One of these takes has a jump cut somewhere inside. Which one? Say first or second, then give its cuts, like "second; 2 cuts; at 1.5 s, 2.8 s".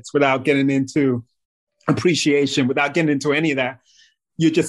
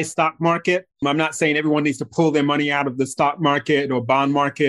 second; 1 cut; at 0.9 s